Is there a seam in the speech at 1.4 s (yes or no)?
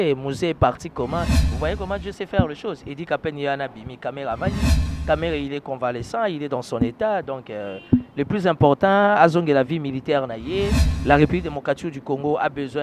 yes